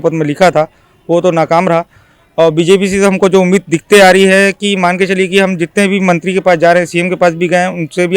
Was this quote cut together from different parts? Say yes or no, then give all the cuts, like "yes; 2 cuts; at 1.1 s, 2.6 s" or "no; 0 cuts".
no; 0 cuts